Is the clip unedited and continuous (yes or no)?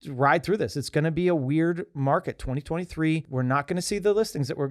no